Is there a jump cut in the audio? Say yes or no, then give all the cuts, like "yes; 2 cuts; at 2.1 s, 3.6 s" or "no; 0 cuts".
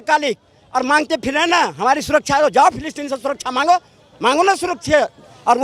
no; 0 cuts